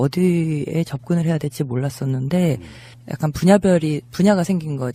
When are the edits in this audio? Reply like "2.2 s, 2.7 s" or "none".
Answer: none